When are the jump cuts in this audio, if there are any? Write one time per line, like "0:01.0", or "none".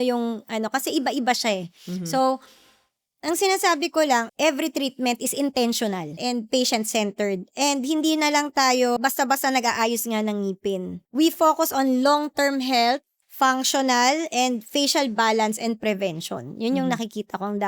0:04.3
0:06.1
0:09.0
0:11.0
0:13.2

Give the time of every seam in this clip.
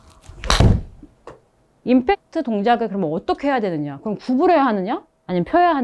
0:01.7

